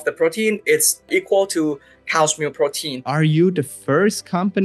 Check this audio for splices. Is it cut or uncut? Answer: cut